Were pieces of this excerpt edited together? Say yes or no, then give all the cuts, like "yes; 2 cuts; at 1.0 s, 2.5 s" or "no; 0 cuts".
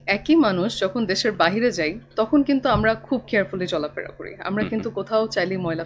no; 0 cuts